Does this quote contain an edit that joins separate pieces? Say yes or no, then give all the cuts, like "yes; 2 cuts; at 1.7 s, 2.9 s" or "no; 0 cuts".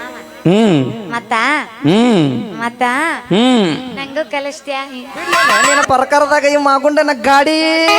yes; 1 cut; at 5.7 s